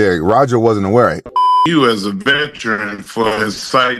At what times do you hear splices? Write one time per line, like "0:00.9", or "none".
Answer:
0:01.3